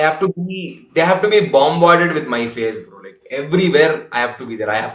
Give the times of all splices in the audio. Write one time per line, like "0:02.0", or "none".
none